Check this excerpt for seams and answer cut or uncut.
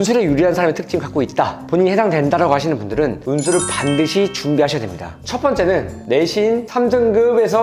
uncut